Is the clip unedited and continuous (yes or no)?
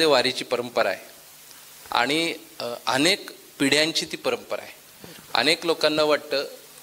yes